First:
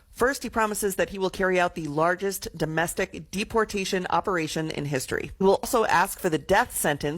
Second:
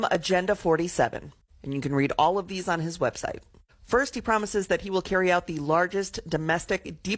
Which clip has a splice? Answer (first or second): first